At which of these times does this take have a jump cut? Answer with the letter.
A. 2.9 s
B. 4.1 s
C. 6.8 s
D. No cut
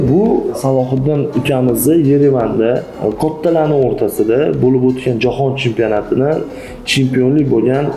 A